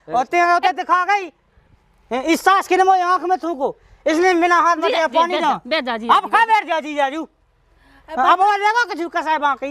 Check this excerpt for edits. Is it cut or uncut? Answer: uncut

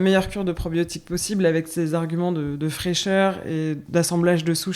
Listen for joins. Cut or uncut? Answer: cut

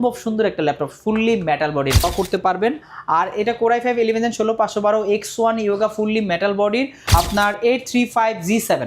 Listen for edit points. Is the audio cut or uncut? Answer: cut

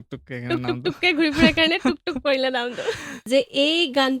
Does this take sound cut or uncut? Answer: cut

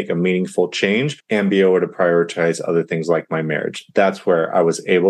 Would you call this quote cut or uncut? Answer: uncut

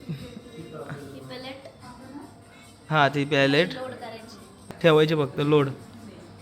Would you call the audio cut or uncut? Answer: cut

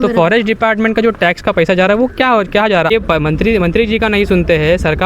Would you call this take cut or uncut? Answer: cut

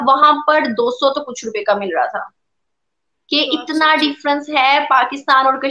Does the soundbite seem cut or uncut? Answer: uncut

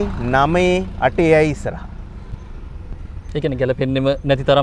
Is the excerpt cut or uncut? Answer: uncut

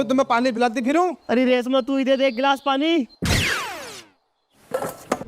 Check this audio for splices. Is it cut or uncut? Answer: cut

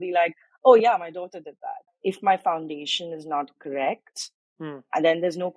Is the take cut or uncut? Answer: cut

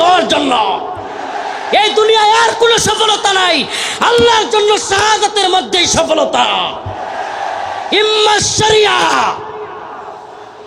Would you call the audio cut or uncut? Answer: uncut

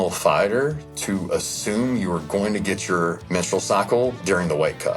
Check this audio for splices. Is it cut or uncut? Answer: cut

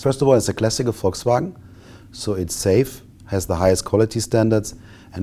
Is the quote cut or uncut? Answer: uncut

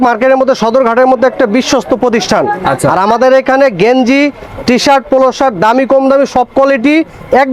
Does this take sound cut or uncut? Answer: uncut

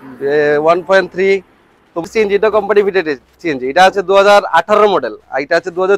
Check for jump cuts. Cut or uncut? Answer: cut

